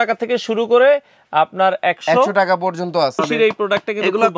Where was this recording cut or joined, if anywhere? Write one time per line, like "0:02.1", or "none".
0:03.2